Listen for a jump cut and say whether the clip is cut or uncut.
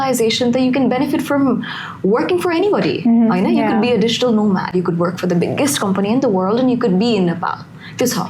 uncut